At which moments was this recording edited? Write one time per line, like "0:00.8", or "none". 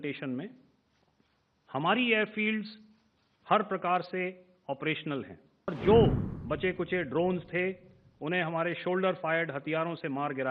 0:05.7